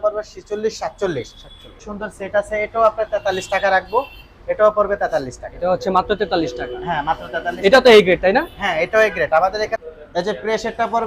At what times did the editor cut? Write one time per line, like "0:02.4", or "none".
0:01.8
0:09.7